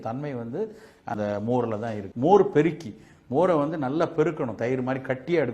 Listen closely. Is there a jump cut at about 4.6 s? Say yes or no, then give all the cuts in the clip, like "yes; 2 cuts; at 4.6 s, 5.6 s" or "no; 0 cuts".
no; 1 cut; at 2.1 s